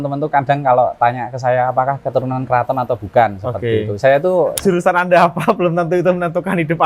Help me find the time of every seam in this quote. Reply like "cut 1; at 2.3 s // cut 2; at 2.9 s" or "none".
cut 1; at 4.6 s